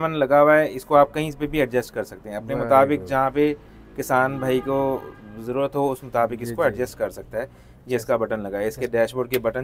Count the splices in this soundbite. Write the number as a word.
zero